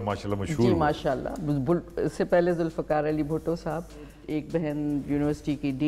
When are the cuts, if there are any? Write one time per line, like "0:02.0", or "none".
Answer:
0:04.2